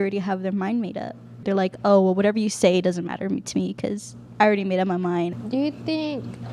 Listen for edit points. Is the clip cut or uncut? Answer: cut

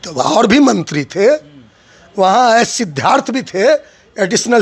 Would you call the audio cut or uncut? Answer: uncut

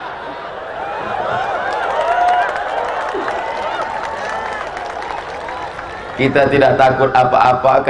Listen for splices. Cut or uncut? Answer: uncut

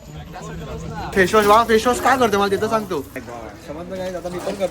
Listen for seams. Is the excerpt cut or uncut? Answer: cut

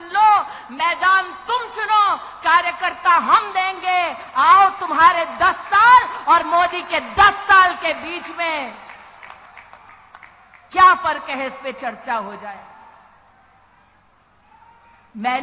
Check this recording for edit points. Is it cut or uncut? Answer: uncut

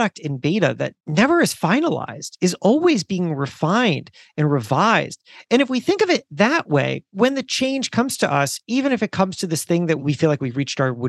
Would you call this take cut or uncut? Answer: cut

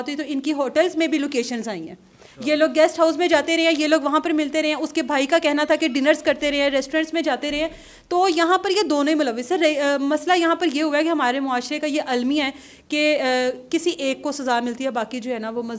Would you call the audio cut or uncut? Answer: uncut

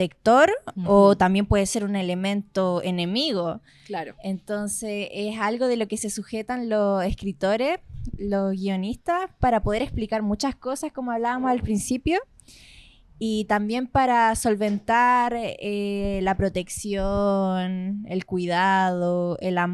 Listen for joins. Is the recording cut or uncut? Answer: uncut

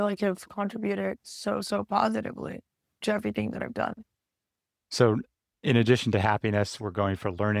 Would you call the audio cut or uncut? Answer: uncut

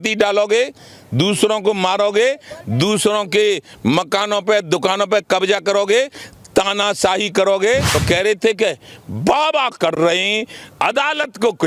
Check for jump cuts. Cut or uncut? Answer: cut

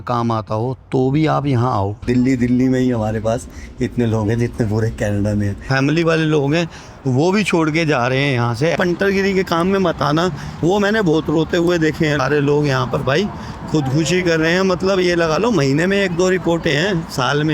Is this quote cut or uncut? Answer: cut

